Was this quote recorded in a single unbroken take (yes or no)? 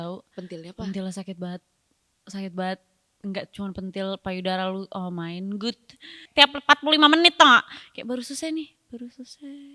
no